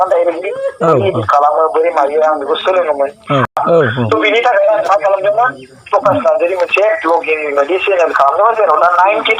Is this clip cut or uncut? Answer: cut